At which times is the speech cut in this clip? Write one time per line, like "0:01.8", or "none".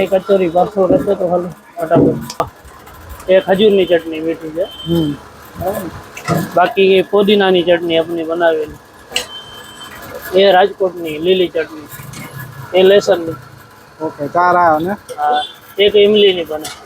0:02.4